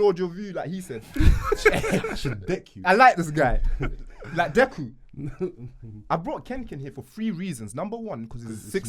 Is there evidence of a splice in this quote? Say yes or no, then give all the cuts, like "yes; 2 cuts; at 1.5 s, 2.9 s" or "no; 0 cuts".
no; 0 cuts